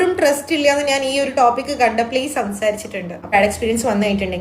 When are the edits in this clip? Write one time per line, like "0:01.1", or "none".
0:03.3